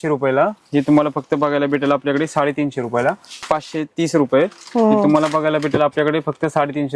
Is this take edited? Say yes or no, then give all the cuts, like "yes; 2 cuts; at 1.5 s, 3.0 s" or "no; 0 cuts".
yes; 1 cut; at 3.4 s